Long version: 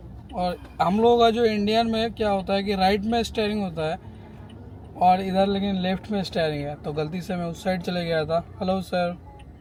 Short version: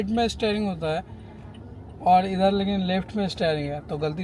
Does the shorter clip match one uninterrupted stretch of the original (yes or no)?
yes